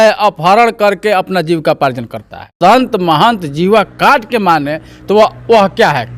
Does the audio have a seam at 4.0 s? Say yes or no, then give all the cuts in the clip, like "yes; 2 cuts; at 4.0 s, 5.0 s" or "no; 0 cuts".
no; 1 cut; at 2.5 s